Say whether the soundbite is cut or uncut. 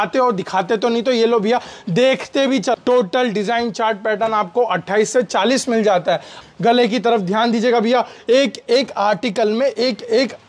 cut